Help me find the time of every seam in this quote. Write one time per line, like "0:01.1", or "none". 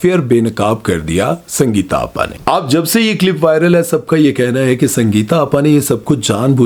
none